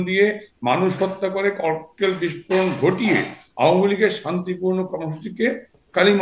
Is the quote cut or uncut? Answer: uncut